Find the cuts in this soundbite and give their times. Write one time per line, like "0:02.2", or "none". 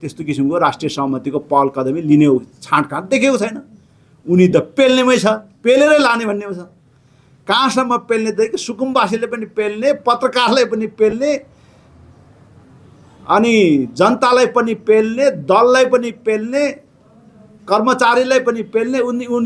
none